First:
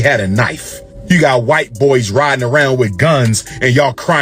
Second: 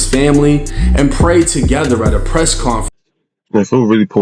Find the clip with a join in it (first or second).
second